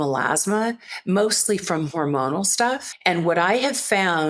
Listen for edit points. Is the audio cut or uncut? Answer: cut